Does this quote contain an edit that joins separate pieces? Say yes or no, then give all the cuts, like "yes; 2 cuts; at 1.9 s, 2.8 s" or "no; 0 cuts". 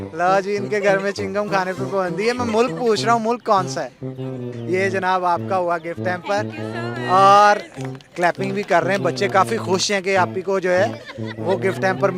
yes; 1 cut; at 4.3 s